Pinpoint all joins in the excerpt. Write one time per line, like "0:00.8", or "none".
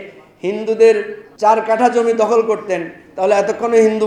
0:01.2